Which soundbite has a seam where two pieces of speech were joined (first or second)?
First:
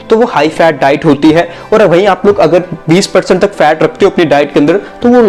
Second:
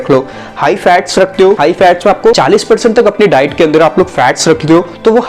second